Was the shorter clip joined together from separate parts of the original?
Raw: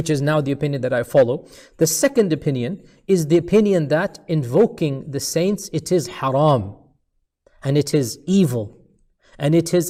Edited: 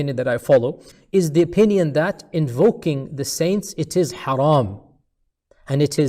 yes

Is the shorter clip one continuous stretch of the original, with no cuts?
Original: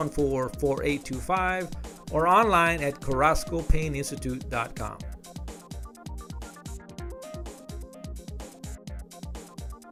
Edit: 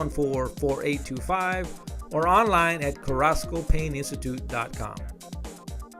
no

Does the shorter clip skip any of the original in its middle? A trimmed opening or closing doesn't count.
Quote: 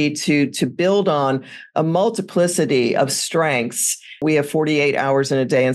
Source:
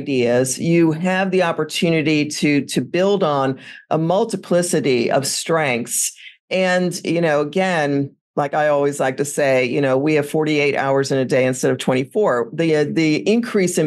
yes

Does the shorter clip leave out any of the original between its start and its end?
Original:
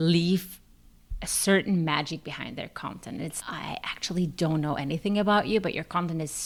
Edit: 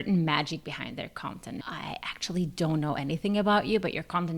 yes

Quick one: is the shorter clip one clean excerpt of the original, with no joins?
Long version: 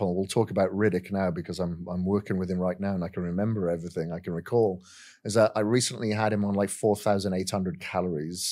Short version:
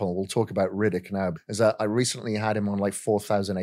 no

